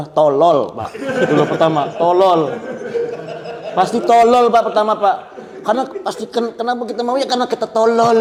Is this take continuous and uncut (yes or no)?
yes